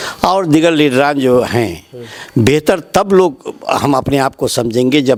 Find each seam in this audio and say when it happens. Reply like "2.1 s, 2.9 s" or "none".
none